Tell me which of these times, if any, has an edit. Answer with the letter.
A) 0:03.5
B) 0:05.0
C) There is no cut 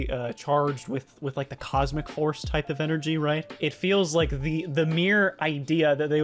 A